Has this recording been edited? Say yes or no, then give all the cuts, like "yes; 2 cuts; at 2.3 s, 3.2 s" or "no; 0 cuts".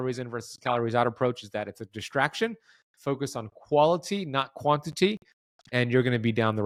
no; 0 cuts